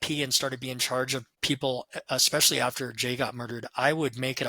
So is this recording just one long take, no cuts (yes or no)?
no